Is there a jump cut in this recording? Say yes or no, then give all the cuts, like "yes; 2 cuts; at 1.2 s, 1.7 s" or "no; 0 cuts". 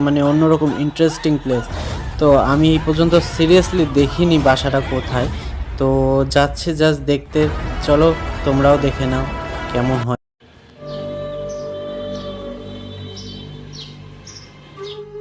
yes; 1 cut; at 10.8 s